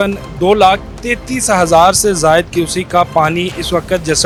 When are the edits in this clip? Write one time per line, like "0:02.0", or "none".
none